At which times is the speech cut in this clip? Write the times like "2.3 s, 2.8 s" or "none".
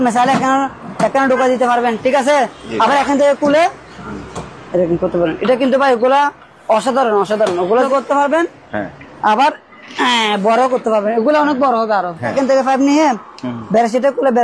7.9 s, 12.3 s